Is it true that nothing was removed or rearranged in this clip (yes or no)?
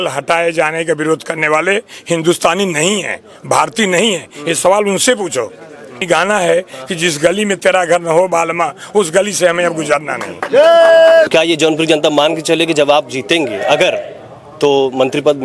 no